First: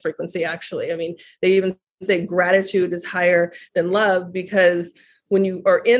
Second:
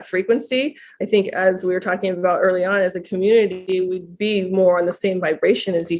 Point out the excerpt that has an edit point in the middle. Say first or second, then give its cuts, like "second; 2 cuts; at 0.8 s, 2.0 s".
second; 1 cut; at 3.6 s